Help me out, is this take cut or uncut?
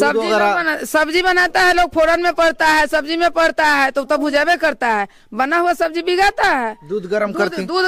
uncut